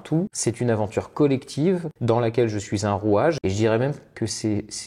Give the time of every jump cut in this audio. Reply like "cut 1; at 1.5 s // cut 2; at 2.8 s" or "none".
cut 1; at 3.4 s